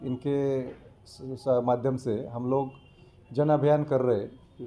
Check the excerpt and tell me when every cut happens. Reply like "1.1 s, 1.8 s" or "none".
none